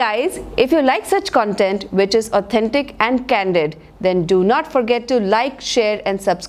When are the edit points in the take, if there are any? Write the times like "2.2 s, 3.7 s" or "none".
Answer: none